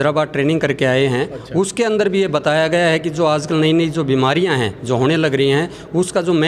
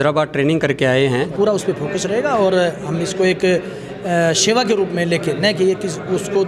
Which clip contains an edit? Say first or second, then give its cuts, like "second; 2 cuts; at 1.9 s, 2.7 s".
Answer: second; 1 cut; at 1.3 s